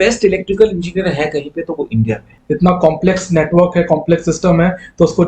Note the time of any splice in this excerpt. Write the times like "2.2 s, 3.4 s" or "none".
2.3 s